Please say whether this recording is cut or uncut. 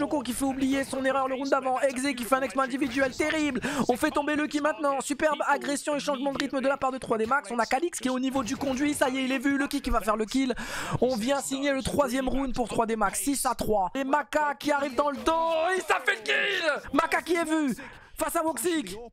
cut